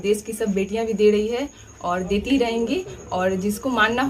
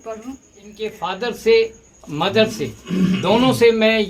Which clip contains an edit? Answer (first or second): second